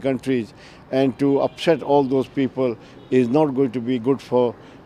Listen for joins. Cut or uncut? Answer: uncut